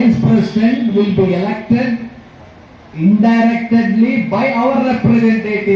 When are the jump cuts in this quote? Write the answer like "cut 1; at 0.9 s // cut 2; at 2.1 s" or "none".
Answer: none